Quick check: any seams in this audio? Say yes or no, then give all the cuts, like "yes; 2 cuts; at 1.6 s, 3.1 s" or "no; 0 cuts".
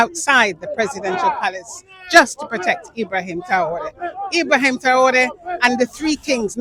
no; 0 cuts